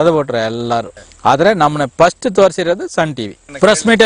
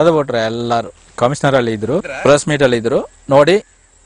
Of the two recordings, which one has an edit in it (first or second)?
second